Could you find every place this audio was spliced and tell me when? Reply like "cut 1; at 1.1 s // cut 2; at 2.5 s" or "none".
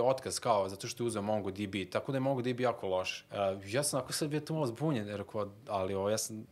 cut 1; at 3.2 s